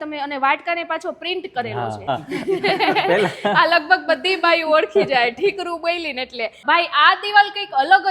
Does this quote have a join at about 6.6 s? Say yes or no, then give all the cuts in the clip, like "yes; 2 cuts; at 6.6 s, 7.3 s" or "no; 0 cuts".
yes; 2 cuts; at 2.1 s, 6.6 s